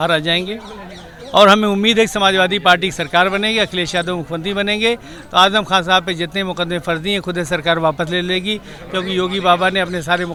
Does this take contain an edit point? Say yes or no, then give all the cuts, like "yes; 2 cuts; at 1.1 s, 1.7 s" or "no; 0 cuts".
no; 0 cuts